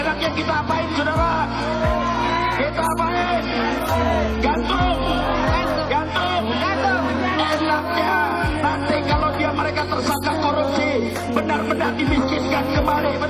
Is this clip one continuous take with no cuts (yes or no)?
yes